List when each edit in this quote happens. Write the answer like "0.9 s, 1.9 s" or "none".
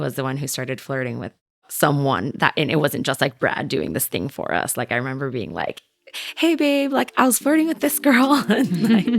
1.7 s